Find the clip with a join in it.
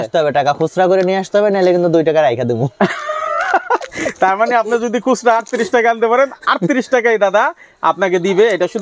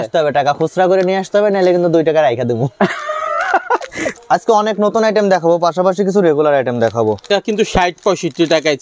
second; 2 cuts; at 4.2 s, 7.3 s

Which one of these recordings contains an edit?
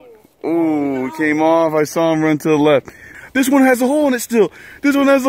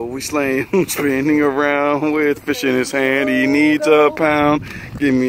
first; 1 cut; at 3.1 s

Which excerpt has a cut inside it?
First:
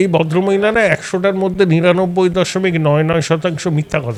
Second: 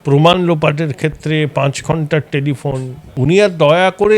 second; 1 cut; at 3.0 s

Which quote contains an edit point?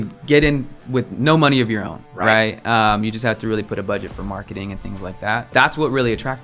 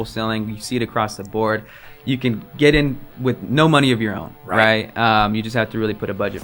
first; 1 cut; at 5.5 s

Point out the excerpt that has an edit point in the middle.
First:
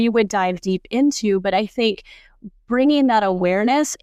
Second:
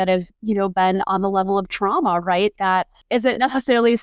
second; 1 cut; at 3.0 s

